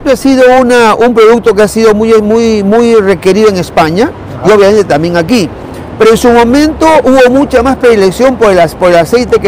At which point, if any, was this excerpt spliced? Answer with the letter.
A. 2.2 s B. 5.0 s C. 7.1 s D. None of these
D